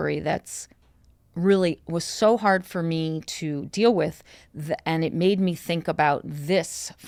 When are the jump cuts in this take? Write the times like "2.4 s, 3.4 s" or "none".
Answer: none